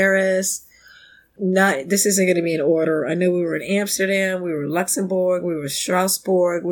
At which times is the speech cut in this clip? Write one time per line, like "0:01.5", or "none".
0:01.2